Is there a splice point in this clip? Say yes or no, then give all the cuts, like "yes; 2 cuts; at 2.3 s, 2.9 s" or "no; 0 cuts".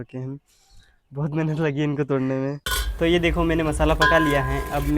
yes; 1 cut; at 2.7 s